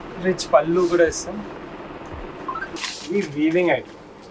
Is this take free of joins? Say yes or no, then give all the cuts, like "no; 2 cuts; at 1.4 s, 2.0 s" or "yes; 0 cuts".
no; 1 cut; at 2.8 s